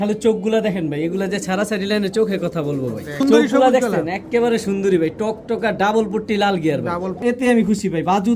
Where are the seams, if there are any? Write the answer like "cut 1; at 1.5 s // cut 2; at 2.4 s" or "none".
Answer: cut 1; at 3.2 s // cut 2; at 7.2 s